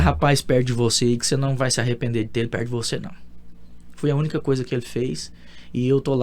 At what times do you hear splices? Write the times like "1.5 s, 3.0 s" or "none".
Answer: none